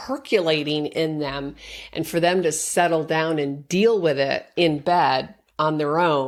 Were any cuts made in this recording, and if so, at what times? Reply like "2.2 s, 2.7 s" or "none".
none